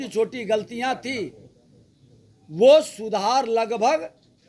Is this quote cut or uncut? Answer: uncut